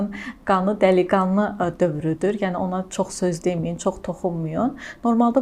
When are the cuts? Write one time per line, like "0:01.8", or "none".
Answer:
none